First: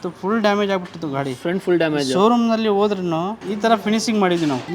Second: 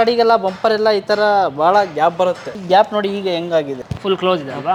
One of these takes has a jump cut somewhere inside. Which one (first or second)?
first